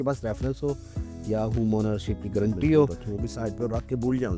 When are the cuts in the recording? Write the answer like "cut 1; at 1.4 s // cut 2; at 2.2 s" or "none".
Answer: cut 1; at 3.0 s